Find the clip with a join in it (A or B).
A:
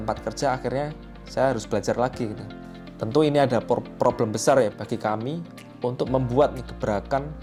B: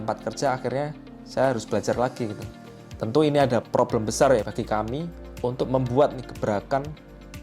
B